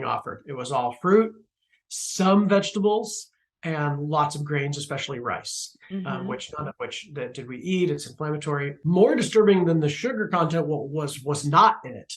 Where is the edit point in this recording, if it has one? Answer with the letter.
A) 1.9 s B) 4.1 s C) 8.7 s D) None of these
C